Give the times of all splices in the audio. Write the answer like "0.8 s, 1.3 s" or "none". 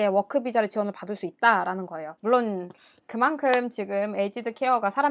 none

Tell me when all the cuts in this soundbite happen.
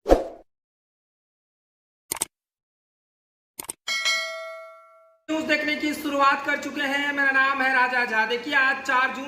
4.9 s

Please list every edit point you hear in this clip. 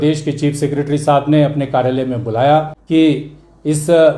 2.8 s

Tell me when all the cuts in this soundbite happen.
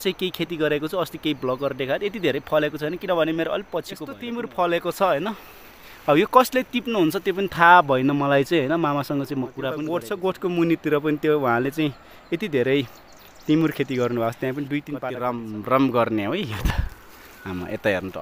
4.2 s, 9.8 s, 15.1 s

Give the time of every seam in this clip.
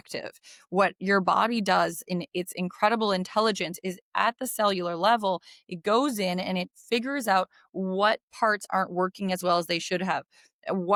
none

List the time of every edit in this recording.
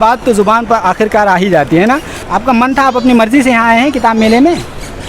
2.2 s

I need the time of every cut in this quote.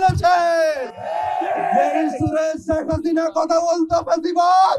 none

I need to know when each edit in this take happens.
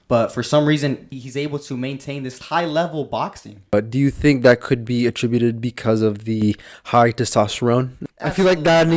1.2 s, 2.4 s, 3.7 s, 8.0 s

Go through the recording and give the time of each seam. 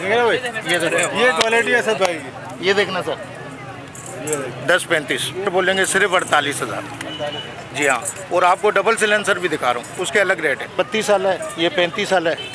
5.5 s, 10.7 s

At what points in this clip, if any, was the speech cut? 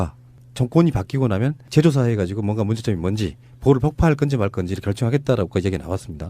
3.5 s

